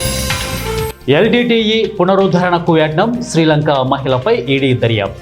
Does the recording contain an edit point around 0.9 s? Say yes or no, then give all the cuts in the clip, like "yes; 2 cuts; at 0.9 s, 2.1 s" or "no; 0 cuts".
yes; 1 cut; at 0.9 s